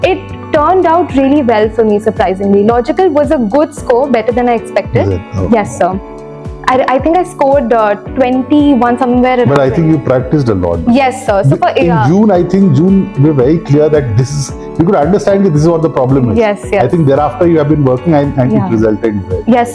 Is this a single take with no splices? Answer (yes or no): yes